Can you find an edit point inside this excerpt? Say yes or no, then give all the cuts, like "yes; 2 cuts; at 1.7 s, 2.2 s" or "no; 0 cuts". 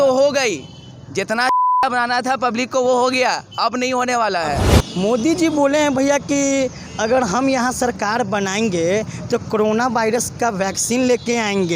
yes; 1 cut; at 4.7 s